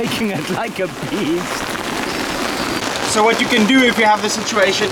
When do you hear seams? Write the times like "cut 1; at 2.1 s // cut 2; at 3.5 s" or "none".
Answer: none